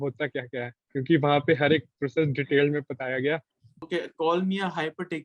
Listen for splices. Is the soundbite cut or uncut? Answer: cut